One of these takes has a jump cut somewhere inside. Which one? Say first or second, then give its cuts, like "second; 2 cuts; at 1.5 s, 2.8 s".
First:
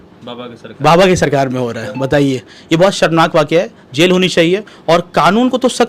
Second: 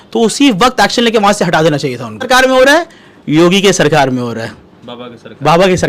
second; 1 cut; at 2.2 s